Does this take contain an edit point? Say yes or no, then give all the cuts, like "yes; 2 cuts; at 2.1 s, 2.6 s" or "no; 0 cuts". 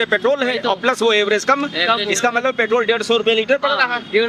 no; 0 cuts